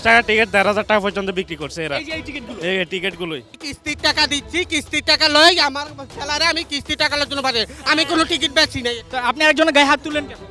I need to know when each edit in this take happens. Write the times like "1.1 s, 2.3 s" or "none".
3.6 s